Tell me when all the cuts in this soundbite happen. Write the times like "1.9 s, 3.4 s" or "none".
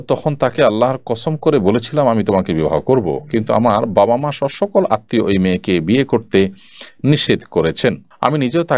none